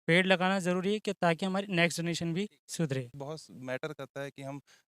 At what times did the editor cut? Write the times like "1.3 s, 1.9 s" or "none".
3.1 s